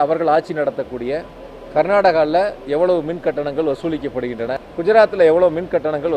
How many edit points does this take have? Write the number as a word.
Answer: one